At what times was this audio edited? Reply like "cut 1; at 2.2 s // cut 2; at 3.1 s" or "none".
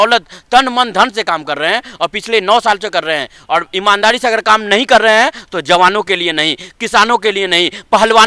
none